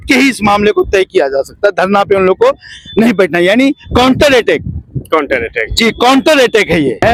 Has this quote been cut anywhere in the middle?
no; 0 cuts

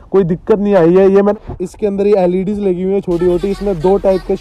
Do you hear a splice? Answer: yes; 1 cut; at 1.3 s

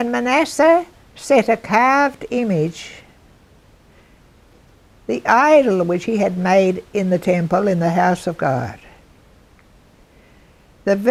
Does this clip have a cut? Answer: no; 0 cuts

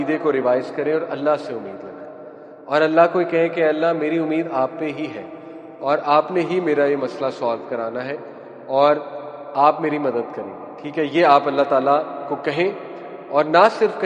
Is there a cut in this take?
no; 0 cuts

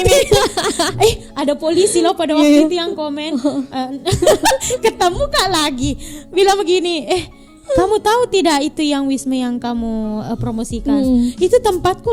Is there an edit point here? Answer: no; 0 cuts

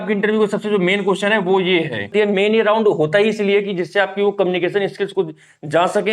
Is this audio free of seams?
no; 1 cut; at 2.1 s

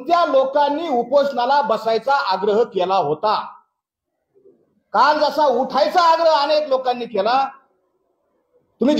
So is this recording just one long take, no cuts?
yes; 0 cuts

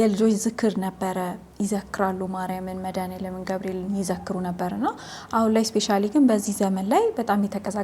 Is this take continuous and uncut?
yes; 0 cuts

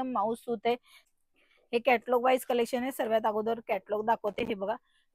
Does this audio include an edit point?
yes; 1 cut; at 1.0 s

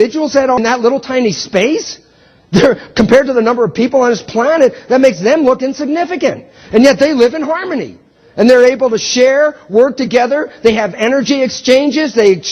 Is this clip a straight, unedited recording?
yes; 0 cuts

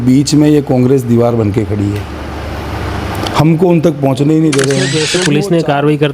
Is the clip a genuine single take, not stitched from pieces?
no; 1 cut; at 5.1 s

